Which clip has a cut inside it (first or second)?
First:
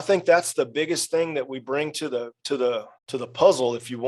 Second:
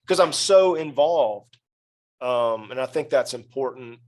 first